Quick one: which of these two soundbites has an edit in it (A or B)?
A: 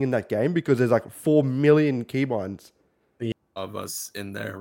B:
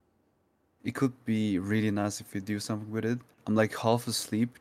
A